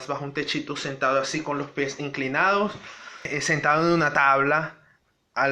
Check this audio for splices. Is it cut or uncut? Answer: cut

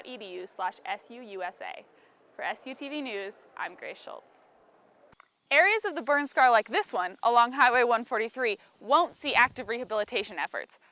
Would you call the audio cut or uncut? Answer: cut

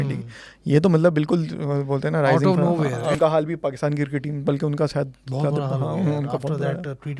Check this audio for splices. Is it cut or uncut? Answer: cut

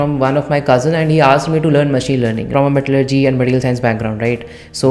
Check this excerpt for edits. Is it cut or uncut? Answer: cut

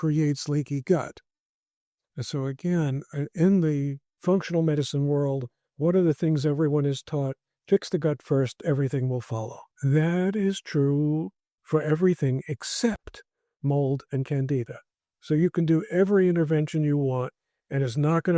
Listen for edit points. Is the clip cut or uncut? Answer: cut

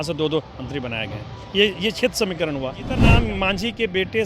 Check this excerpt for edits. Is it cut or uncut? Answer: cut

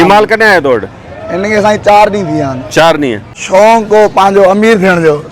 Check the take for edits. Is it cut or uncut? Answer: cut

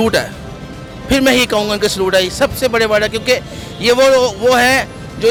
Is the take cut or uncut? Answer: uncut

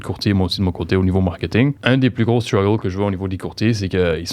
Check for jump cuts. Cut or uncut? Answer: cut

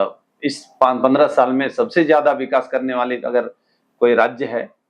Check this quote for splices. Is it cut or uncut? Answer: uncut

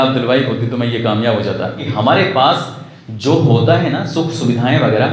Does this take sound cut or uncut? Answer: cut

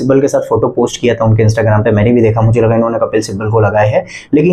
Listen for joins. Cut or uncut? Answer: uncut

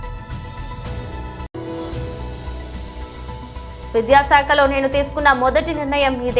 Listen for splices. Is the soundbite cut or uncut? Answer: uncut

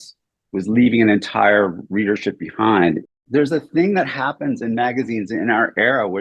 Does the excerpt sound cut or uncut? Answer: cut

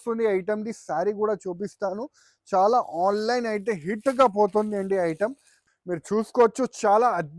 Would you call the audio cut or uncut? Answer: cut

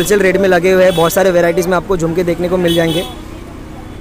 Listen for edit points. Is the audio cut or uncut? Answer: uncut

